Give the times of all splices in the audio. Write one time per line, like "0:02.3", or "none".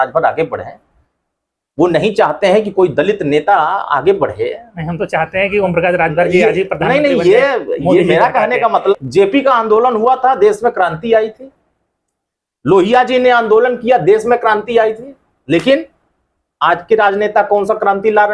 0:08.9